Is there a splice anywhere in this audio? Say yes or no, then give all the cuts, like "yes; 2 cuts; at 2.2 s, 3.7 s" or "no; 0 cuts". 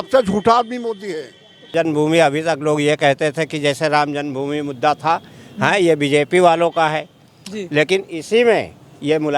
yes; 1 cut; at 1.7 s